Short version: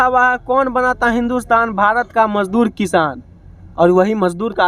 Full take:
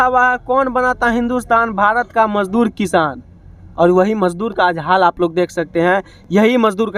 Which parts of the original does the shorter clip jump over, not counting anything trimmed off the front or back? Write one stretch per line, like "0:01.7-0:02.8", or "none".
none